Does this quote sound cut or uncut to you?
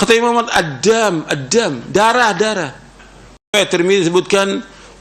cut